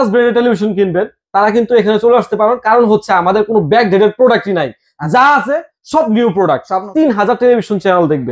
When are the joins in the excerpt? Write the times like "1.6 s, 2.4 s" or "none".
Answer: 6.8 s